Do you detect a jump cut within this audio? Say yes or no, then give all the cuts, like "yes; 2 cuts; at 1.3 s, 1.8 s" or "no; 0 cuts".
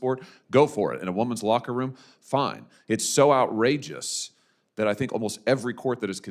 no; 0 cuts